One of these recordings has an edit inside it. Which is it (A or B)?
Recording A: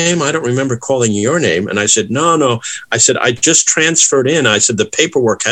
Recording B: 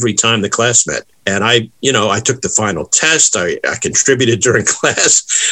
B